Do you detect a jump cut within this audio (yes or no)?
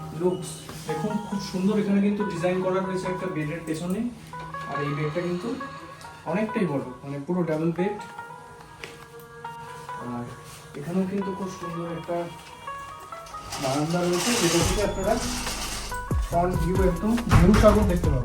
no